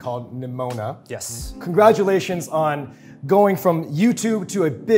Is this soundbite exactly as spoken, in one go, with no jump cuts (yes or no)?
yes